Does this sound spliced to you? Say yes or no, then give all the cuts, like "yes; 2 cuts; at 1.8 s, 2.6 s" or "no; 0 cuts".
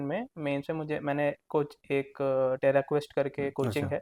no; 0 cuts